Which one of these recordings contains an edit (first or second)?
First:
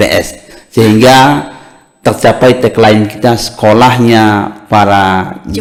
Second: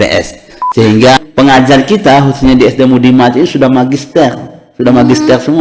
second